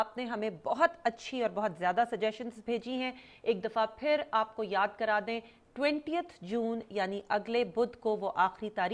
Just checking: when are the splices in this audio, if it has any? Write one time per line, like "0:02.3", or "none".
0:05.6